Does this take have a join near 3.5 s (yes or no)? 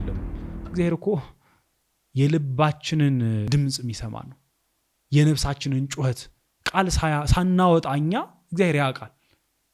yes